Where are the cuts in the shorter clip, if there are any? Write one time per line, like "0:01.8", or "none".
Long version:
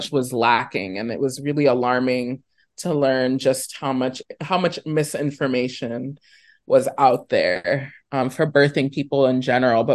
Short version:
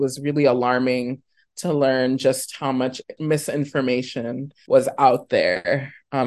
0:03.2
0:04.5